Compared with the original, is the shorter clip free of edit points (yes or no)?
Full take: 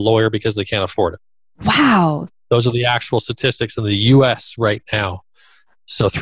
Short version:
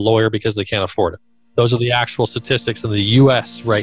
no